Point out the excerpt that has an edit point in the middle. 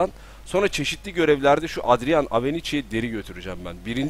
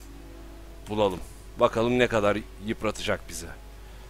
first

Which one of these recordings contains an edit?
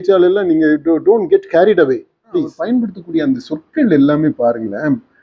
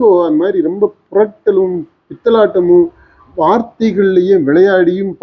first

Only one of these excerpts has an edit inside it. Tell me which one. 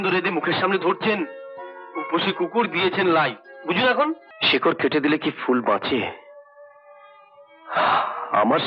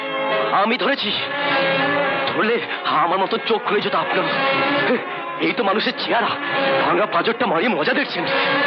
first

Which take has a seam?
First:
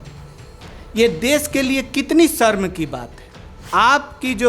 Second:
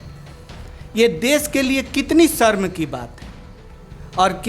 first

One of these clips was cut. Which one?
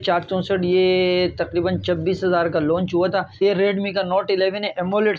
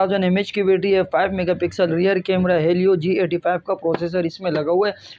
first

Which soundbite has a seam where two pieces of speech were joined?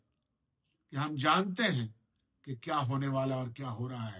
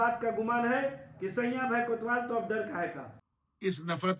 second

